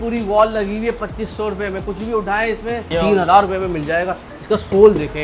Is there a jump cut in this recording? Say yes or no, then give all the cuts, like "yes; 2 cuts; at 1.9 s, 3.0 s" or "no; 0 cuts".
yes; 1 cut; at 2.9 s